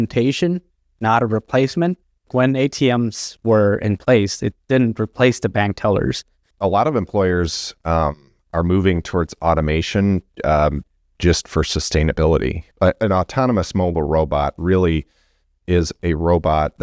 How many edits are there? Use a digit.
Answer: 3